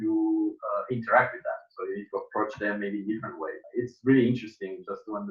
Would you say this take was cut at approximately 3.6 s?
yes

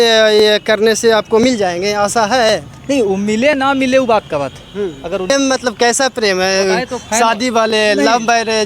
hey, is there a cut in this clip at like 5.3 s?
yes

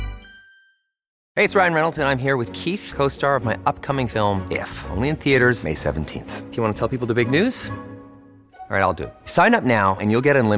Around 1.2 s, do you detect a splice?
yes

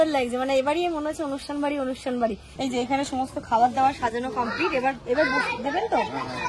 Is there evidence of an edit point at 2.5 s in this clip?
yes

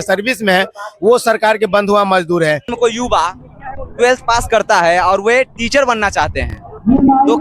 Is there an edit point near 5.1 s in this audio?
no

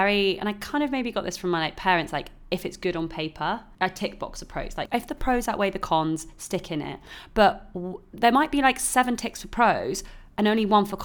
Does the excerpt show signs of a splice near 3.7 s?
yes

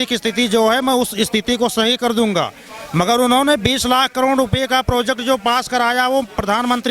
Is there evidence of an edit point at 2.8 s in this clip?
no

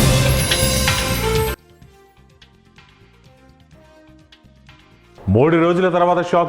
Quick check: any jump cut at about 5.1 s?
yes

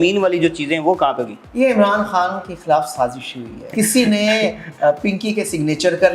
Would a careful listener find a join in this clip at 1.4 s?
yes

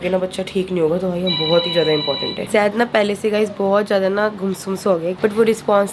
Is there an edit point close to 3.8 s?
no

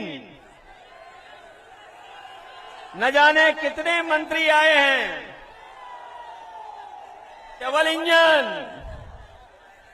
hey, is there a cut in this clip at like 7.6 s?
yes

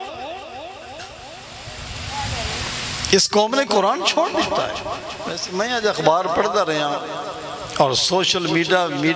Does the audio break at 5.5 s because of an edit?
yes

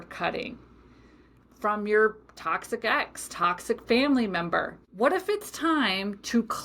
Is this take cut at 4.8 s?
yes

